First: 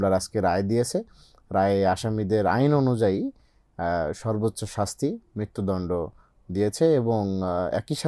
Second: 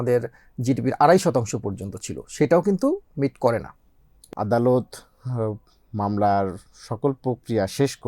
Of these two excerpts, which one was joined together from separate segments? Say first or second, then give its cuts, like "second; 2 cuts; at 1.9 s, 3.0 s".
second; 1 cut; at 4.1 s